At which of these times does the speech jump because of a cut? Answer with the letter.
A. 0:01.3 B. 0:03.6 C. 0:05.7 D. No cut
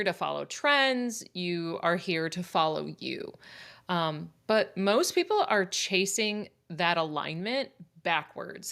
D